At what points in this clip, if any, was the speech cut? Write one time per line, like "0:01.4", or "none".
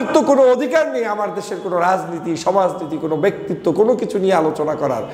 none